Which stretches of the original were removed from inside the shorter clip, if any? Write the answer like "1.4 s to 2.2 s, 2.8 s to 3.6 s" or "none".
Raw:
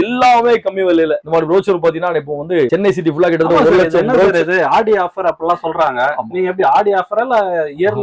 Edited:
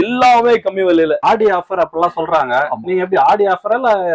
1.2 s to 4.7 s